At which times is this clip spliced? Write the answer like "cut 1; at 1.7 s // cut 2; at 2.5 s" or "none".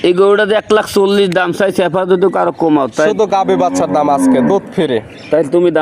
none